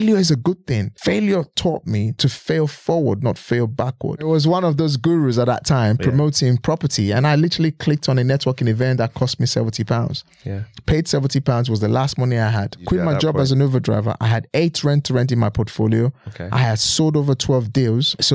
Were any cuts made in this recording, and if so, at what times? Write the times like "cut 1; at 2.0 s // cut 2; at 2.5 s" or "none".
cut 1; at 0.9 s // cut 2; at 2.1 s // cut 3; at 4.3 s // cut 4; at 12.8 s